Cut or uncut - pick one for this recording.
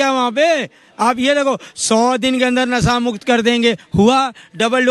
uncut